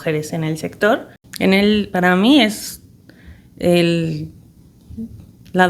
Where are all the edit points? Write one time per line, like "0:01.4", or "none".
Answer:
0:01.2